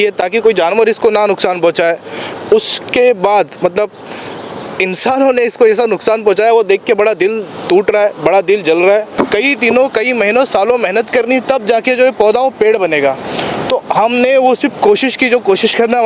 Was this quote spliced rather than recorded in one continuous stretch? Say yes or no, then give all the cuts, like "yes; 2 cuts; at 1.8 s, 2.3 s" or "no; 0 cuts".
yes; 1 cut; at 9.1 s